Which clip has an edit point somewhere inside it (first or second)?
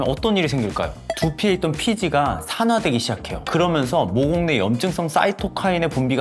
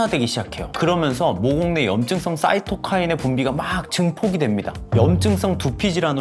second